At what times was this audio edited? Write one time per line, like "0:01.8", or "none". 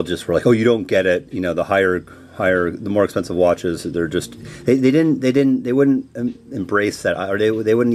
none